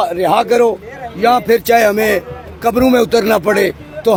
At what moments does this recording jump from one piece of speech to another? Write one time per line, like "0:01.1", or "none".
none

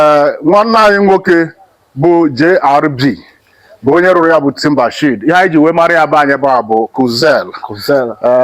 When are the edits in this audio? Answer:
none

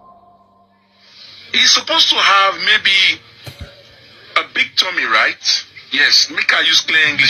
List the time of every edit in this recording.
none

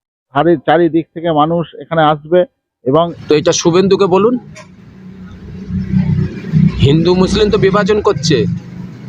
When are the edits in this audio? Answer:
0:03.2

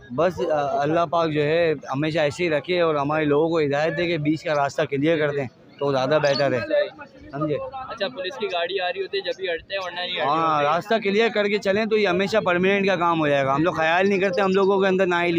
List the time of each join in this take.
none

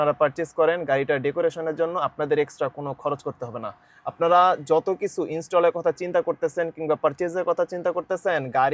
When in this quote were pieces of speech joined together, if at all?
none

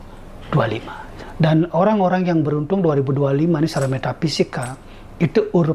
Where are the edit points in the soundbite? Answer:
0:01.1

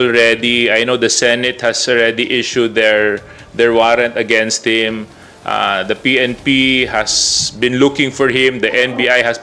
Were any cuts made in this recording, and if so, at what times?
none

